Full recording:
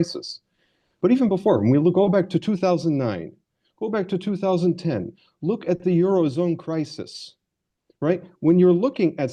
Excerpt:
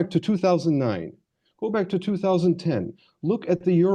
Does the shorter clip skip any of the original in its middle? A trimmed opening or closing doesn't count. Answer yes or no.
no